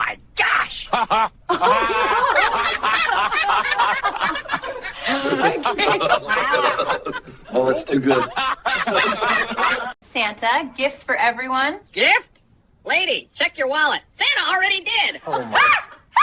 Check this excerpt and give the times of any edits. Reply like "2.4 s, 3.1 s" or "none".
10.0 s